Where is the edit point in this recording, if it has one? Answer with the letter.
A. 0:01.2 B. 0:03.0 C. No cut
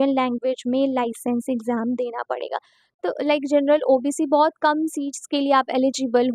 B